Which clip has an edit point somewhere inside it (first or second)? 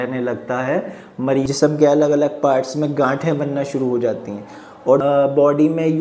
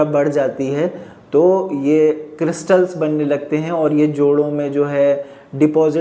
first